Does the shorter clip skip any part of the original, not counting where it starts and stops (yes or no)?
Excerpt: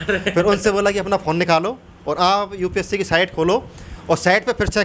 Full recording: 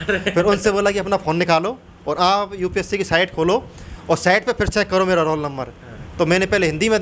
no